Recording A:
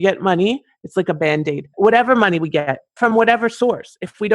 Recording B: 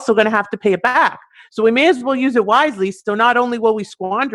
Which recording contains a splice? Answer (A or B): A